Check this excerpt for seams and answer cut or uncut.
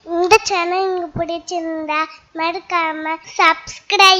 cut